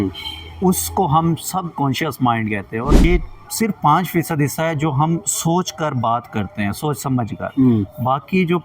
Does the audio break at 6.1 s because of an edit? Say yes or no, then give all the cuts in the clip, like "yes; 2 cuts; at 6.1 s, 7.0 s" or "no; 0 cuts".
no; 1 cut; at 3.0 s